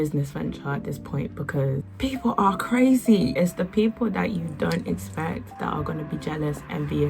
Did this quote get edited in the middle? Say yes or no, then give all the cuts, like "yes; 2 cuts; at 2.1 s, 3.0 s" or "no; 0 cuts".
yes; 3 cuts; at 1.9 s, 3.3 s, 5.5 s